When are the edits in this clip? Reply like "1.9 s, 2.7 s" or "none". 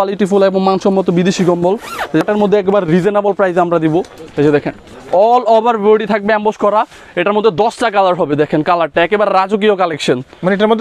none